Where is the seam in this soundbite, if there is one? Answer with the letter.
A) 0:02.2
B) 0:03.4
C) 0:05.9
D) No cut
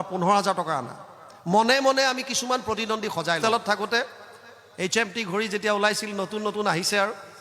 B